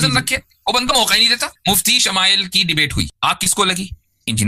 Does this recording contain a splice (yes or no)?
yes